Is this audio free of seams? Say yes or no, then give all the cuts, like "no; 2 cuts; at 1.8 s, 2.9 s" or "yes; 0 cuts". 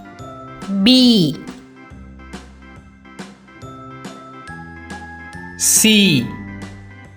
no; 2 cuts; at 1.7 s, 5.5 s